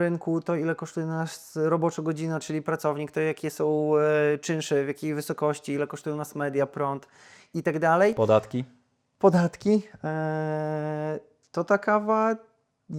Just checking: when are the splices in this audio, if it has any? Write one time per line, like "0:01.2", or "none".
none